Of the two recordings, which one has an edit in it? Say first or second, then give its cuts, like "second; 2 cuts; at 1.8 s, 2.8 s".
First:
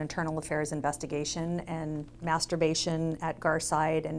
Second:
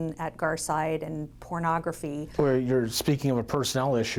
second; 1 cut; at 2.3 s